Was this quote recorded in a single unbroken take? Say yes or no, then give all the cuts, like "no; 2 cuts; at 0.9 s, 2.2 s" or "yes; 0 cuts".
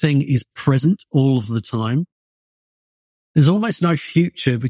yes; 0 cuts